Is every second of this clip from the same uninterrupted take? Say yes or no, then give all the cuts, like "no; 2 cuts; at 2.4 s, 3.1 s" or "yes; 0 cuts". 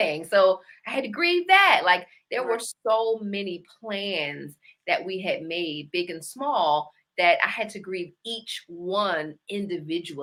yes; 0 cuts